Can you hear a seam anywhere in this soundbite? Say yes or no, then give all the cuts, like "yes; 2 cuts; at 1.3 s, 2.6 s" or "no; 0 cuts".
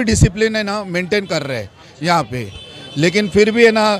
no; 0 cuts